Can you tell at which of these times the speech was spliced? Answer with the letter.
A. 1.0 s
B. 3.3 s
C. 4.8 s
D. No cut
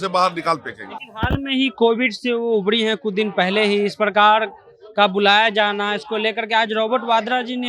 D